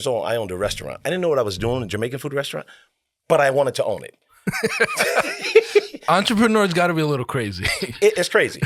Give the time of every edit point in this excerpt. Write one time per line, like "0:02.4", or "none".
none